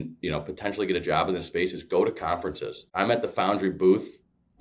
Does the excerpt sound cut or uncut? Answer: cut